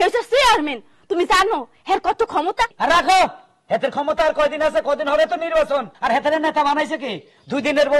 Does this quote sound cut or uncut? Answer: cut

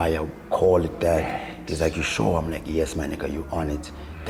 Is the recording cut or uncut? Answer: uncut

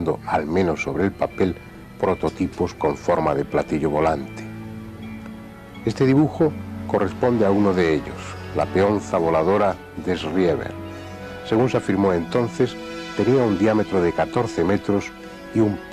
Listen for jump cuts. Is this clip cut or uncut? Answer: uncut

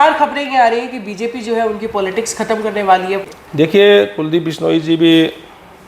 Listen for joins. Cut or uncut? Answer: cut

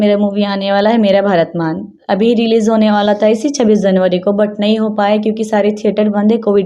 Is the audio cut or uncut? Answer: uncut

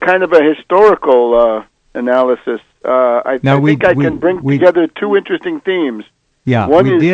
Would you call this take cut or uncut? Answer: uncut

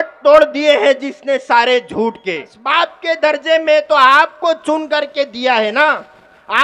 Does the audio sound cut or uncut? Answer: cut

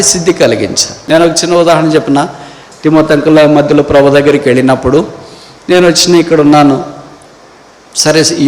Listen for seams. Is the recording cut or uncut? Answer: cut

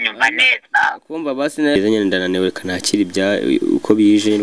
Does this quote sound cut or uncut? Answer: cut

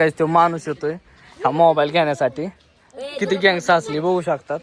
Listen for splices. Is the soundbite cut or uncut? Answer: uncut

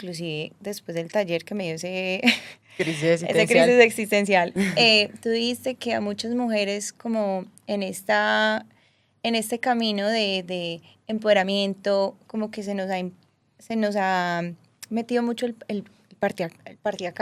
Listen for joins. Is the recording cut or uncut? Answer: uncut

